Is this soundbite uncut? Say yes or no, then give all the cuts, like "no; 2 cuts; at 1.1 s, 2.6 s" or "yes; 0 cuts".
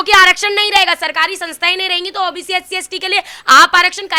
yes; 0 cuts